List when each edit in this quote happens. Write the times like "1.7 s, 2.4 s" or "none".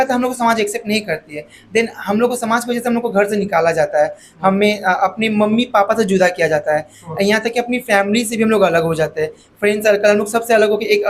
none